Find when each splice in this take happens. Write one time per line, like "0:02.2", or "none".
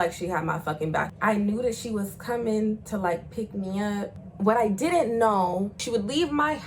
0:01.1
0:04.2
0:05.8